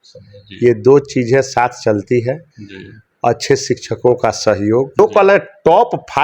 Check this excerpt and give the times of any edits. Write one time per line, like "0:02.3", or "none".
0:05.0